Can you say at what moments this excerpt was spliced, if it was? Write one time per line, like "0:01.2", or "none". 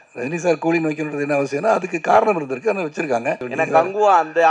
0:03.5